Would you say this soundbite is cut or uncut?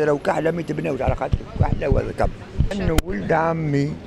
cut